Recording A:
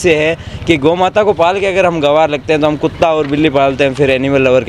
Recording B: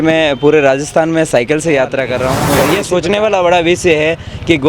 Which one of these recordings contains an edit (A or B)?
B